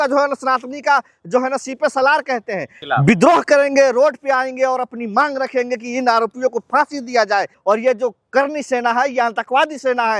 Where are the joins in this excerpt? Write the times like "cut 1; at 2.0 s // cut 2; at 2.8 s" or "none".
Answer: cut 1; at 2.8 s // cut 2; at 7.6 s